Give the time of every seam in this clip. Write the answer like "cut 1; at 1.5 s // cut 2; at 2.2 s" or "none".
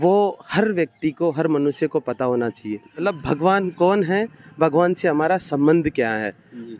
cut 1; at 3.0 s

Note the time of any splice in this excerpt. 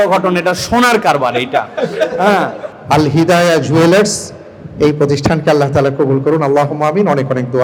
cut 1; at 2.6 s

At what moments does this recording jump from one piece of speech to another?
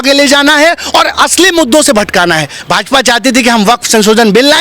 cut 1; at 2.6 s

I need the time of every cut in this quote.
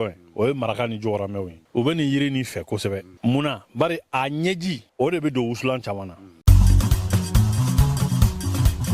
cut 1; at 1.5 s // cut 2; at 3.1 s // cut 3; at 4.8 s // cut 4; at 6.3 s

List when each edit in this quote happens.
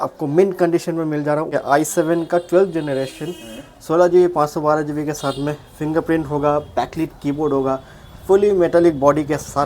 cut 1; at 1.5 s

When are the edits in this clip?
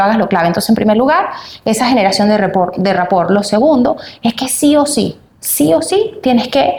none

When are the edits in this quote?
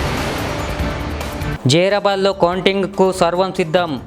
none

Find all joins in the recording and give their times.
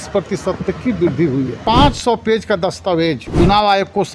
cut 1; at 1.6 s // cut 2; at 3.2 s

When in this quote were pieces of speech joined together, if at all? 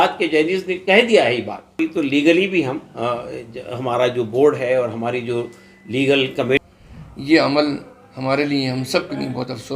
cut 1; at 1.8 s // cut 2; at 6.6 s

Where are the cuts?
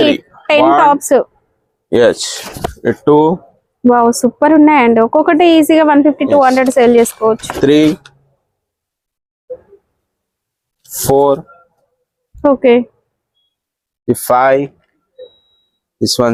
none

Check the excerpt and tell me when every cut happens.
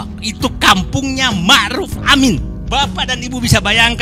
cut 1; at 2.5 s

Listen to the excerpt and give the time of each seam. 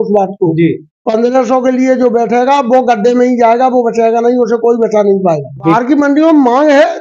cut 1; at 5.8 s

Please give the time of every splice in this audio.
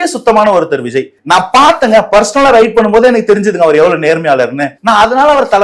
cut 1; at 1.1 s // cut 2; at 4.7 s

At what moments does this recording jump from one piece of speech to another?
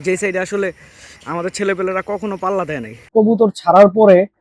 cut 1; at 3.1 s

